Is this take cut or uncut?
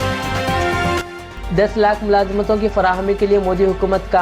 cut